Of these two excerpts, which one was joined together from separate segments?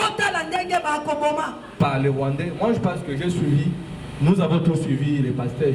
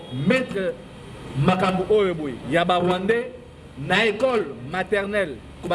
first; 1 cut; at 1.6 s

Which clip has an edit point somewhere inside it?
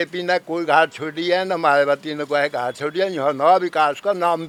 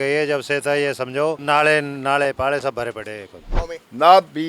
second; 2 cuts; at 1.4 s, 3.5 s

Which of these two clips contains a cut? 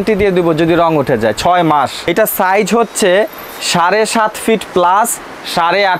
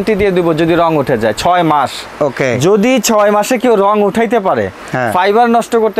first; 1 cut; at 2.0 s

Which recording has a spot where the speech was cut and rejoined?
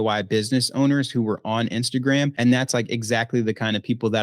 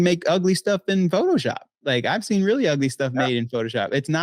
first; 1 cut; at 2.3 s

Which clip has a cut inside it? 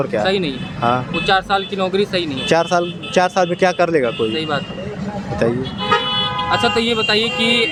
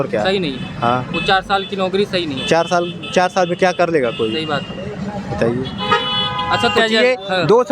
second; 1 cut; at 6.8 s

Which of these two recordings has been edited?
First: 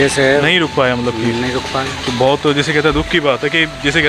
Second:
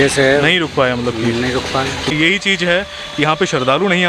second; 1 cut; at 2.1 s

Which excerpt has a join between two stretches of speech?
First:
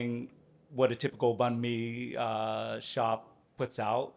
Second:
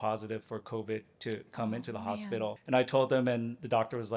second; 1 cut; at 2.6 s

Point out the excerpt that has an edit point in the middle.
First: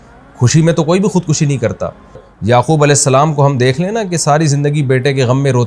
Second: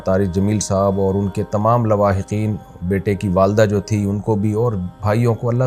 first; 1 cut; at 2.3 s

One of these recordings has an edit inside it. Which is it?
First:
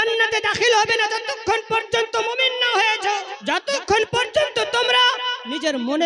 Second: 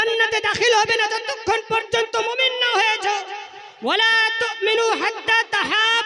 first; 1 cut; at 3.3 s

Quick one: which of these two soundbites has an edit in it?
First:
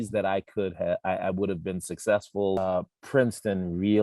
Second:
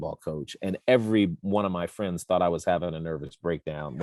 first; 1 cut; at 2.6 s

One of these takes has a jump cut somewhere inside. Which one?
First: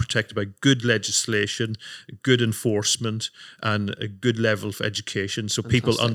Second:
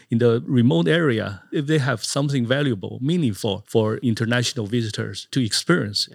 second; 3 cuts; at 1.5 s, 3.9 s, 5.3 s

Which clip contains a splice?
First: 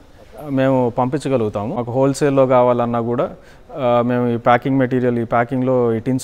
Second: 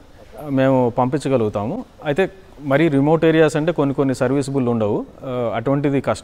first; 1 cut; at 1.8 s

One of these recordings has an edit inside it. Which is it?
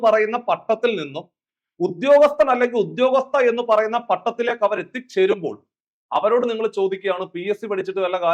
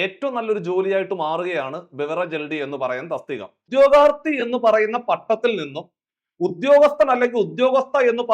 second; 1 cut; at 3.7 s

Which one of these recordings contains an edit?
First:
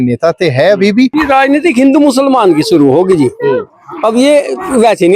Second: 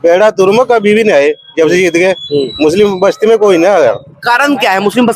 first; 1 cut; at 1.1 s

